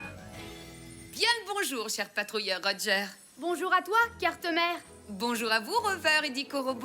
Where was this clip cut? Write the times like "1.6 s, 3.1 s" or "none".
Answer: 1.1 s